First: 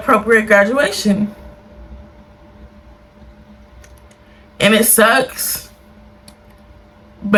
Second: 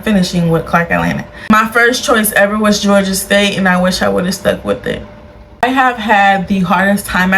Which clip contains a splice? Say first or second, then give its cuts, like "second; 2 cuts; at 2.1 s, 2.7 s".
second; 2 cuts; at 1.3 s, 5.6 s